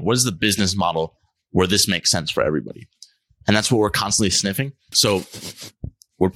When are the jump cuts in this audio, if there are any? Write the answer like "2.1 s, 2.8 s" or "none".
4.8 s